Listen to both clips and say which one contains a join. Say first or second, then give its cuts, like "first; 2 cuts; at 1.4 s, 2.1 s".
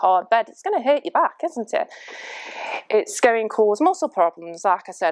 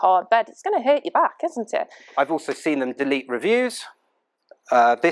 second; 1 cut; at 2.0 s